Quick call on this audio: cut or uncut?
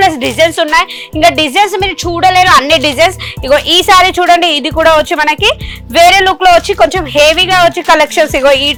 uncut